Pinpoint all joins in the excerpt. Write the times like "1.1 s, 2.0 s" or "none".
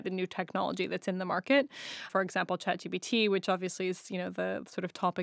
2.1 s